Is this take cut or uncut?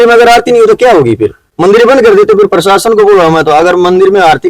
uncut